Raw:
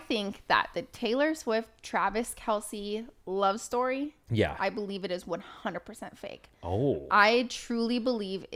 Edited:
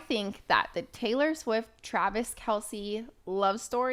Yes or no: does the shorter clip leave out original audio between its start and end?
no